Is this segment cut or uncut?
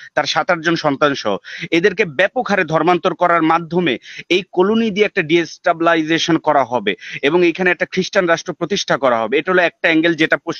uncut